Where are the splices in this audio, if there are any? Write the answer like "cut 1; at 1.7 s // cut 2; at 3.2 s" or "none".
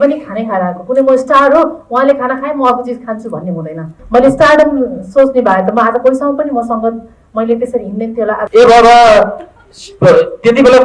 cut 1; at 4.0 s // cut 2; at 8.4 s